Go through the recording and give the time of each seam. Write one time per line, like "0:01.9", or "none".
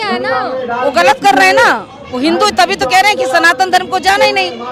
none